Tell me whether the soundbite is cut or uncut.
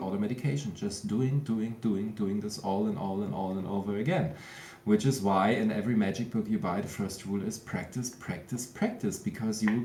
uncut